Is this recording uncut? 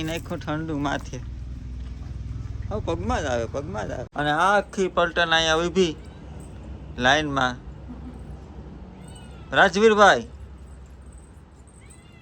no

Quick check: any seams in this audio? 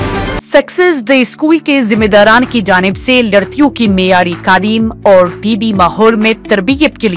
no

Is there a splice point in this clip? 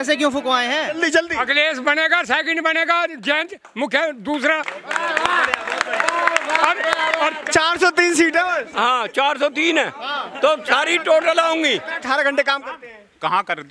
yes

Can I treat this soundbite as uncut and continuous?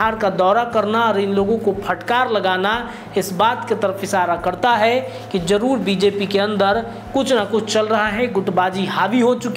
yes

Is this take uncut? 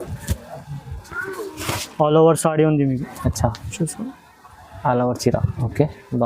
no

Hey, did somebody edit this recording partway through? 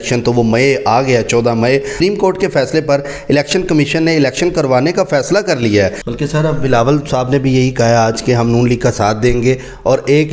yes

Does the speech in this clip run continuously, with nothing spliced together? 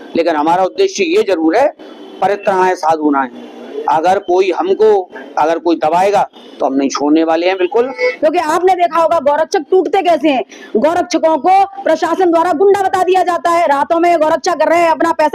no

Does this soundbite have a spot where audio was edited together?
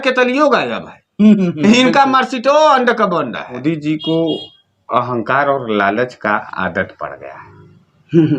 yes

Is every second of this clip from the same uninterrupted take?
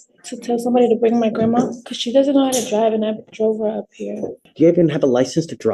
no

